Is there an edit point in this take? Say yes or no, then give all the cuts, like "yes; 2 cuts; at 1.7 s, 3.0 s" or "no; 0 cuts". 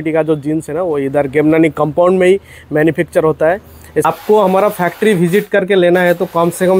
yes; 1 cut; at 4.0 s